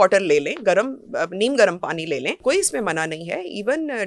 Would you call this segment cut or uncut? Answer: cut